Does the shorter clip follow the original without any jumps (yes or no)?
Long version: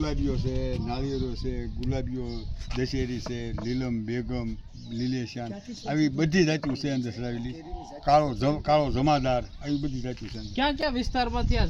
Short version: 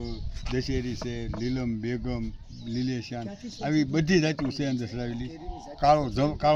yes